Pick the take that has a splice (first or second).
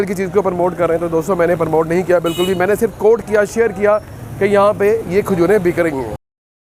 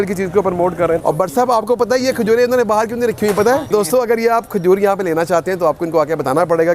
second